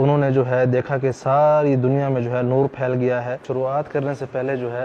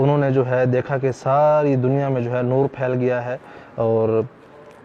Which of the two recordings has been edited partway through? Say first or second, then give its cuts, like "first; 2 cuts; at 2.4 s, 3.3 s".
first; 1 cut; at 3.4 s